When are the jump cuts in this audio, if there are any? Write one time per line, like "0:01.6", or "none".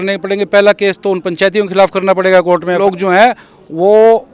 0:02.8